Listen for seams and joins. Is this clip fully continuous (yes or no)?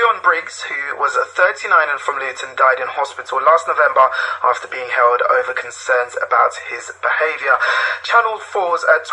no